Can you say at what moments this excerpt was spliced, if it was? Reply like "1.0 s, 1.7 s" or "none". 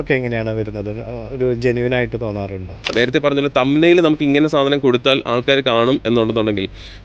2.9 s